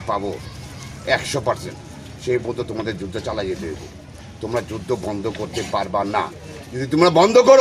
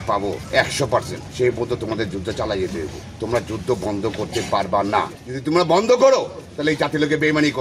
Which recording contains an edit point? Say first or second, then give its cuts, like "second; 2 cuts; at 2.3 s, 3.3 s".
second; 3 cuts; at 0.9 s, 3.0 s, 5.2 s